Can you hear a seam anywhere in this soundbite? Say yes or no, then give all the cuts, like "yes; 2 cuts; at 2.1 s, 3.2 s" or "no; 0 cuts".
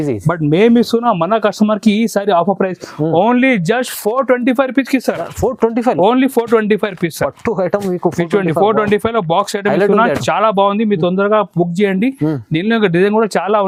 no; 0 cuts